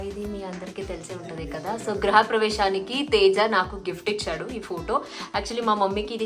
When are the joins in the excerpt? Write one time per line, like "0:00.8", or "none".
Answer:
none